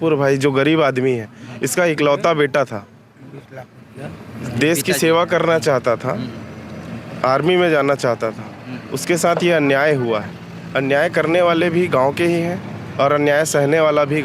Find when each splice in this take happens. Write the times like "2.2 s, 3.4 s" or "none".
none

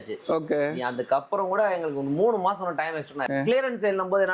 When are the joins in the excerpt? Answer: 3.2 s

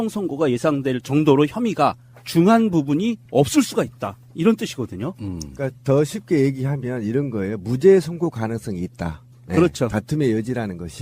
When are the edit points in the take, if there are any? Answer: 5.2 s

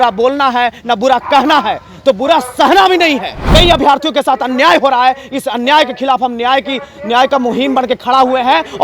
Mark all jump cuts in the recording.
3.3 s

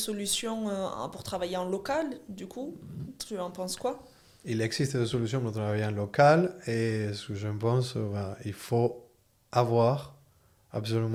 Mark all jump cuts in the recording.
none

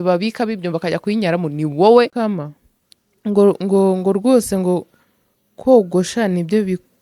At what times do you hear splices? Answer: 2.1 s

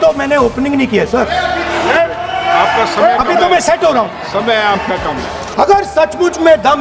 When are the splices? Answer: 5.4 s

